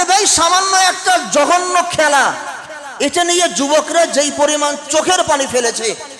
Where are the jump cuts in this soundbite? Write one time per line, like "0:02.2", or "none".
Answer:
none